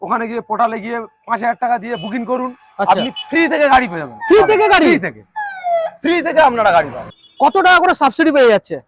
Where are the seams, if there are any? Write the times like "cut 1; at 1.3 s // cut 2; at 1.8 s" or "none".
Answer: cut 1; at 7.2 s